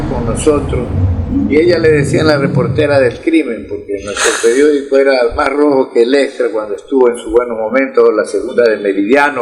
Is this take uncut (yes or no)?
yes